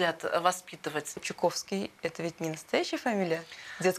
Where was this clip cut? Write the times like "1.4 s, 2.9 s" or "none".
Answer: 1.3 s